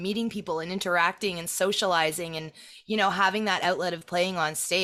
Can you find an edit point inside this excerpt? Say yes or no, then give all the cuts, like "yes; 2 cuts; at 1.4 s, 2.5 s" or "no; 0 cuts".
no; 0 cuts